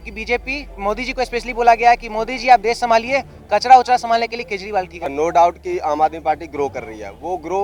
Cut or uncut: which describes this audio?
cut